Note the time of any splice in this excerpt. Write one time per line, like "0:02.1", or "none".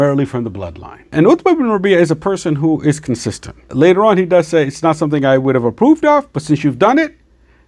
0:01.1
0:03.6